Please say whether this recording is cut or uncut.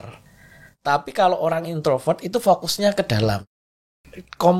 cut